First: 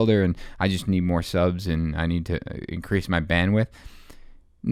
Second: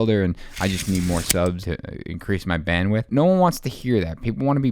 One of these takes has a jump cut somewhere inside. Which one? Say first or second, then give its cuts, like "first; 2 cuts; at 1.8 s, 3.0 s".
second; 2 cuts; at 1.6 s, 3.1 s